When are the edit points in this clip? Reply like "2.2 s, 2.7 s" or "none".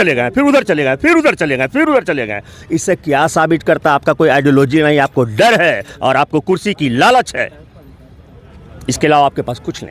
none

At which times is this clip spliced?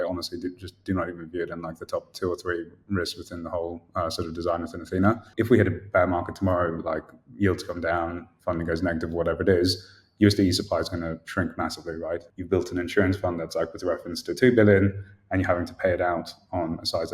5.3 s, 12.3 s

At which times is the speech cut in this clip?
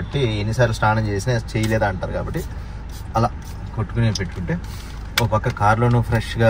none

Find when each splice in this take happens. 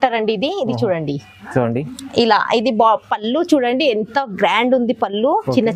none

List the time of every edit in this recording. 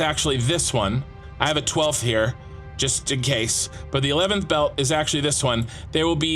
none

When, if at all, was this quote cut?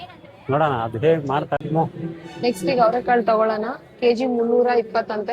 1.6 s

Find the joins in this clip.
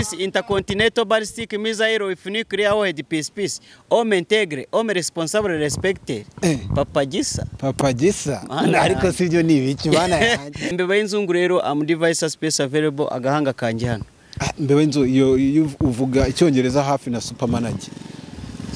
10.7 s

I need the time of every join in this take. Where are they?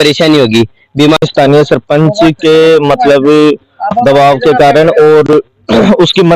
1.2 s

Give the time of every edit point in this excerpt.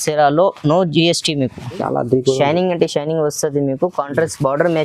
1.8 s

